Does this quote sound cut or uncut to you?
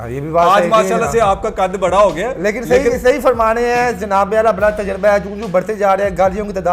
uncut